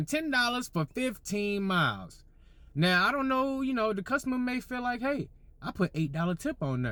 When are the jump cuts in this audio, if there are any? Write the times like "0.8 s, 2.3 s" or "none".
none